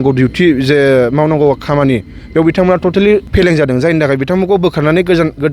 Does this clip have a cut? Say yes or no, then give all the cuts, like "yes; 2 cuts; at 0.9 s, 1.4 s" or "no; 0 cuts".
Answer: yes; 1 cut; at 3.3 s